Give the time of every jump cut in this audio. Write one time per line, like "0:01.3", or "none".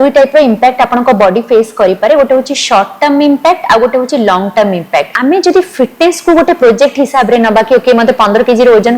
0:05.2